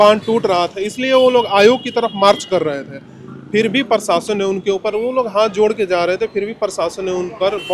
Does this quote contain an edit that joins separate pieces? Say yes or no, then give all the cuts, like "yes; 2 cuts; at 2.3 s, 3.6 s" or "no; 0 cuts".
no; 0 cuts